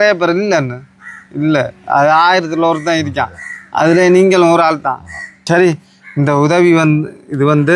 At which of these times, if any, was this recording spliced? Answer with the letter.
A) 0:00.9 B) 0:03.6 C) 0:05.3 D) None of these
C